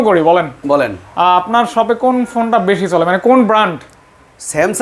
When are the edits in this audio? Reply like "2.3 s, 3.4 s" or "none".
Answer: none